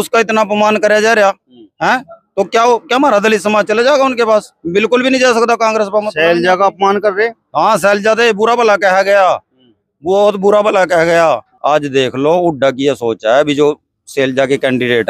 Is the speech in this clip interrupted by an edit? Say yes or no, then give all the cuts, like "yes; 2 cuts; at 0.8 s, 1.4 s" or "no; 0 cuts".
no; 0 cuts